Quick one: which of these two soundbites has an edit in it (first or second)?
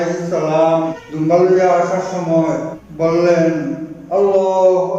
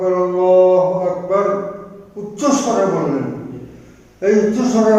first